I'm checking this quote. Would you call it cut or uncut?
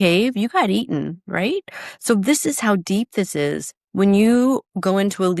uncut